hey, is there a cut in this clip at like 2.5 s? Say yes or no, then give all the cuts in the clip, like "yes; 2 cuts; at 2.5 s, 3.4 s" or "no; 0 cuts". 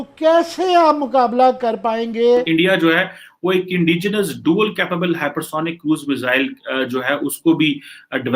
yes; 1 cut; at 2.5 s